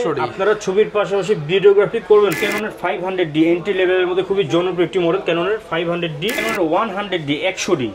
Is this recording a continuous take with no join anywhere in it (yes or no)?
no